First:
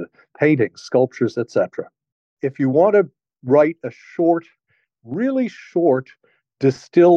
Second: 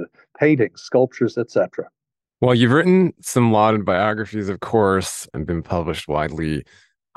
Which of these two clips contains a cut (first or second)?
first